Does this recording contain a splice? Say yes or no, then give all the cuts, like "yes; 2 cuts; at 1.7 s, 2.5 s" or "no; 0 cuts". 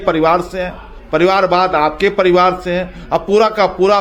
no; 0 cuts